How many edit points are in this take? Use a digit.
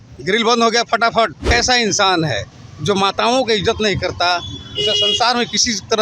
1